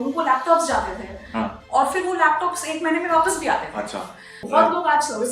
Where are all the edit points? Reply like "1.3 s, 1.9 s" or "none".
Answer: 4.3 s